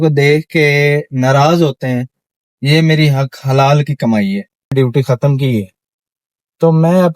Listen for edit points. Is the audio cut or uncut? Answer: cut